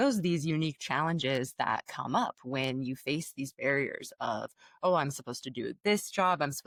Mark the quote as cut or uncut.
uncut